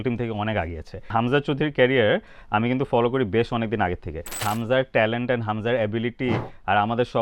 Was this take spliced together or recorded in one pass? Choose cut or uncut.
cut